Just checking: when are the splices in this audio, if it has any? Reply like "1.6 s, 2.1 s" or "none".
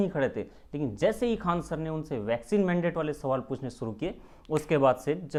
none